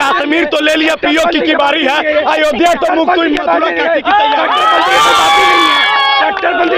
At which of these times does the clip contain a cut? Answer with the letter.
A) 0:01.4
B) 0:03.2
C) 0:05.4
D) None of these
D